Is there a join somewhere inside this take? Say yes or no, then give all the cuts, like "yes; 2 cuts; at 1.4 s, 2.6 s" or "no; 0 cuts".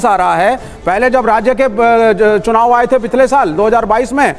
no; 0 cuts